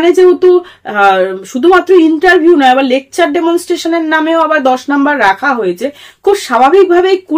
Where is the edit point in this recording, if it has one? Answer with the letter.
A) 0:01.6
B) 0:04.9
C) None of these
C